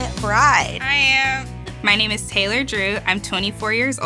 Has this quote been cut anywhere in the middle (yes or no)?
no